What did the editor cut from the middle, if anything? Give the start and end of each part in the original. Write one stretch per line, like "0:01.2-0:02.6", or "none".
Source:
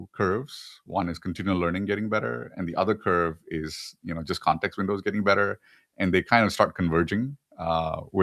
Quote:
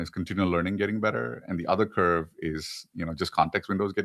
none